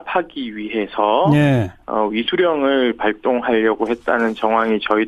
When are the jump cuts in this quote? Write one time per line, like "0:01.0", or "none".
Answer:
0:03.1